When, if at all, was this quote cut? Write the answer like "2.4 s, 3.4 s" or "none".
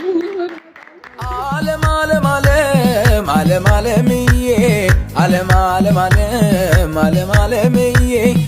1.3 s